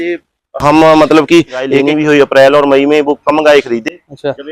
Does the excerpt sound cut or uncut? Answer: cut